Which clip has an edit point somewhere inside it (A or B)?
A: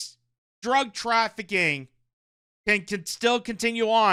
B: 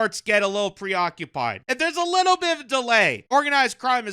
B